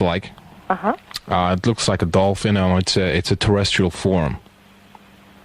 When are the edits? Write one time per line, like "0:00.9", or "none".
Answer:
0:02.0

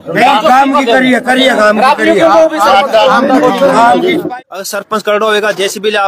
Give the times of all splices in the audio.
0:04.2

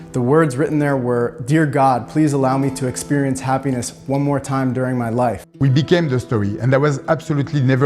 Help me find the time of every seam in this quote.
0:05.5

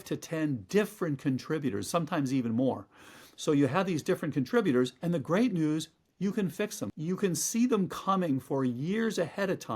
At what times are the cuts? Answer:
0:06.8

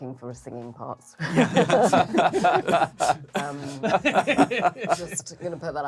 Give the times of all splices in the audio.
none

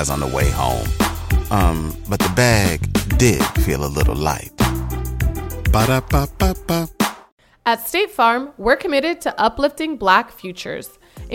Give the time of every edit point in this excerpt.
0:07.3

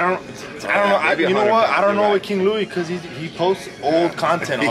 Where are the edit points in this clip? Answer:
none

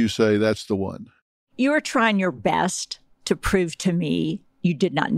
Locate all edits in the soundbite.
none

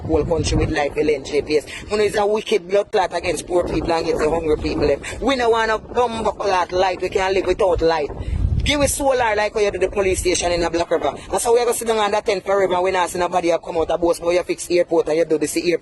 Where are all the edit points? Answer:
none

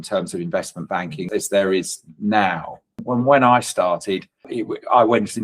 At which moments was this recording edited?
0:01.2
0:02.9
0:04.5

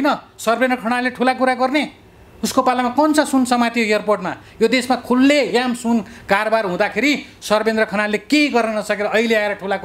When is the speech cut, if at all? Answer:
none

